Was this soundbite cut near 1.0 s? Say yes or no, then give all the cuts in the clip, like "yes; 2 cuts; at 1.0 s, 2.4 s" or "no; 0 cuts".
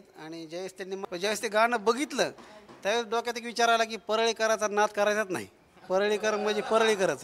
yes; 1 cut; at 1.0 s